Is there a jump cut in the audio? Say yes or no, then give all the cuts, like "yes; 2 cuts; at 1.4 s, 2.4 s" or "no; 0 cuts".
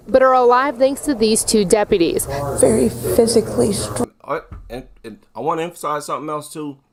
no; 0 cuts